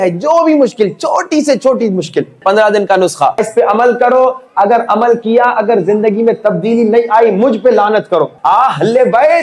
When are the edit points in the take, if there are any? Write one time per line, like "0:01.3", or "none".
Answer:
0:02.4
0:03.5
0:08.3